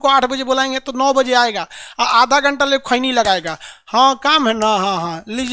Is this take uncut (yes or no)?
yes